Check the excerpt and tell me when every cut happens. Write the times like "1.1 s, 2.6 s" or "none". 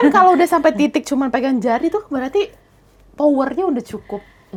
none